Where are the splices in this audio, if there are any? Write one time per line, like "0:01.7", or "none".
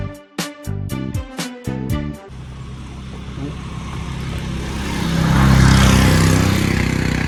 none